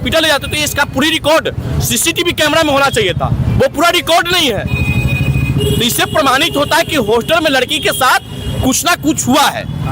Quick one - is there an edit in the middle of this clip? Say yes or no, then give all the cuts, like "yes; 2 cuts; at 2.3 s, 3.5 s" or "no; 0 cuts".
no; 0 cuts